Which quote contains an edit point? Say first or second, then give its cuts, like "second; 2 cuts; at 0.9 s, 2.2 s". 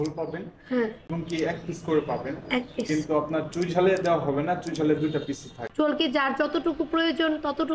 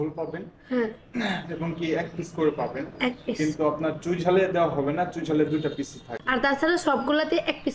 first; 2 cuts; at 1.0 s, 5.6 s